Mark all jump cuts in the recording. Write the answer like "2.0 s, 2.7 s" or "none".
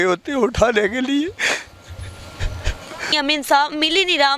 3.1 s